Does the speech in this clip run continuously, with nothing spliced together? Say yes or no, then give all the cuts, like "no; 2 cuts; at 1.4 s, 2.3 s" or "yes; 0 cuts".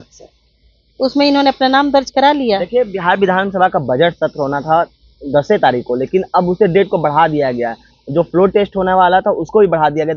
yes; 0 cuts